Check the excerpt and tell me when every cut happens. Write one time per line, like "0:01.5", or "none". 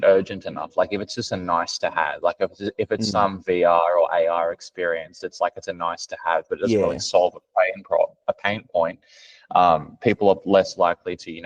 none